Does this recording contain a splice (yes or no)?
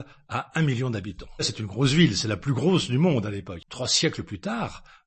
yes